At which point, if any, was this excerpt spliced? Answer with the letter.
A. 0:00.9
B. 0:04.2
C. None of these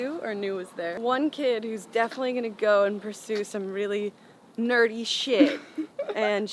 A